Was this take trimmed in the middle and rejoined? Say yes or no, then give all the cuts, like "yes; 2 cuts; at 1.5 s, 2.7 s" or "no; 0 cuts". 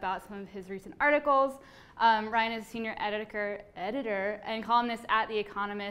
no; 0 cuts